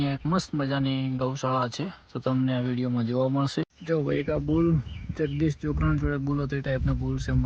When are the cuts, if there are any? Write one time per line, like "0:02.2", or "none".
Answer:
0:03.8